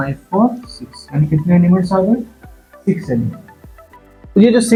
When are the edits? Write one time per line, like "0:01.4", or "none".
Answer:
none

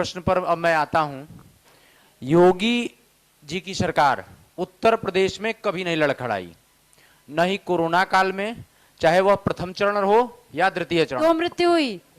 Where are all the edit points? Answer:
0:11.2

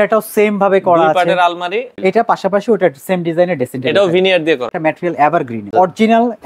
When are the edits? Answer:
0:01.9
0:04.7
0:05.7

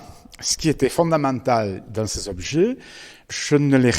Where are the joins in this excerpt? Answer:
none

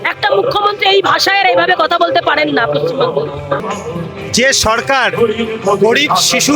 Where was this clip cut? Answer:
0:03.6

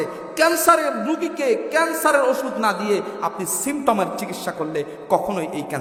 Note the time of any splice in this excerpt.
none

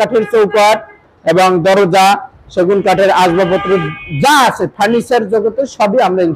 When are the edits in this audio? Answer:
none

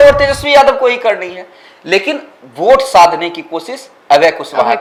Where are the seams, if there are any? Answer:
none

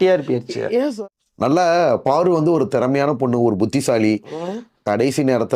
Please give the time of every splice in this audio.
0:00.9

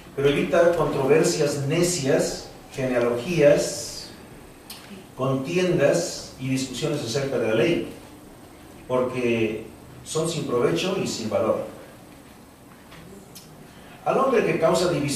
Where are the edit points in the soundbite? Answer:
none

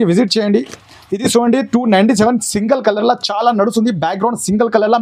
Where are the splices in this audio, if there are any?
none

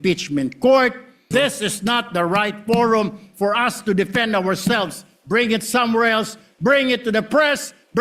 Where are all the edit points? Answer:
0:01.3

